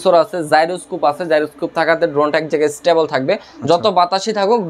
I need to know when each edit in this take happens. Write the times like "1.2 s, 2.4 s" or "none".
none